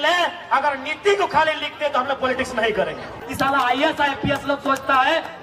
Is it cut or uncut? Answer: cut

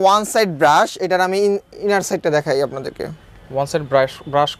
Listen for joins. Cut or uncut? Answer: uncut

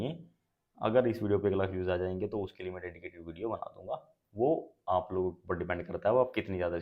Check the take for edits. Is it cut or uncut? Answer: uncut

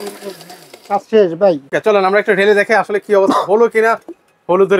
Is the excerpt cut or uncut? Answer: cut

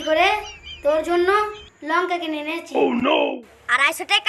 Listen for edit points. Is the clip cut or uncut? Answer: cut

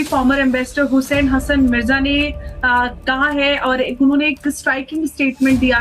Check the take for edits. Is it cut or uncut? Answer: cut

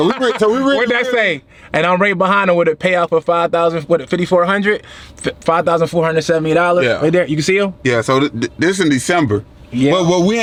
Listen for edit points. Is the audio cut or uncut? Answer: uncut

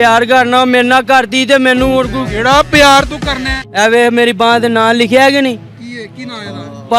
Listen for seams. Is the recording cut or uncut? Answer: cut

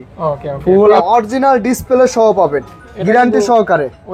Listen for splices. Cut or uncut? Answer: cut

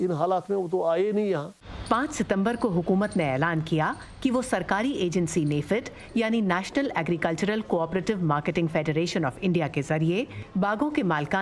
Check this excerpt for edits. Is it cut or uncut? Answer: uncut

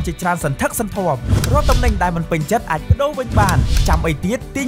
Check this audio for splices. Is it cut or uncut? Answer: uncut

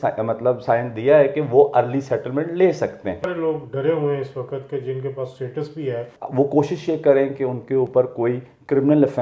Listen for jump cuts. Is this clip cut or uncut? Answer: cut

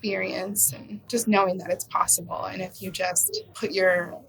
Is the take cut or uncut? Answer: cut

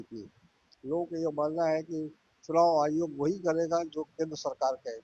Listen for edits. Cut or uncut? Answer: uncut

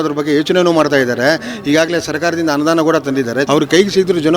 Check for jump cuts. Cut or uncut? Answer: cut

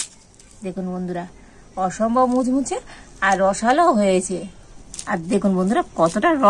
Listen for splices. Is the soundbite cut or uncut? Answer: uncut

